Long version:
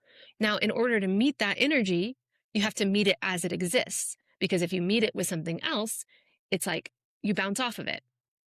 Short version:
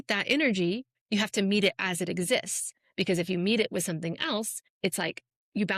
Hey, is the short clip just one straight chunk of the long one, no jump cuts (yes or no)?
no